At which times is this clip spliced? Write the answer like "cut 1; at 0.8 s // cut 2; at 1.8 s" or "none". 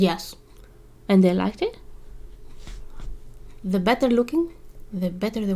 none